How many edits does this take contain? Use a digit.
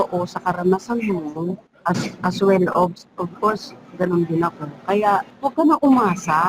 2